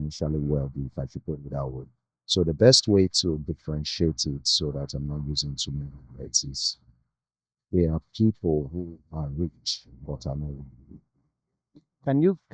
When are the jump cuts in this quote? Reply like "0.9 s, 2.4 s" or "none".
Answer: none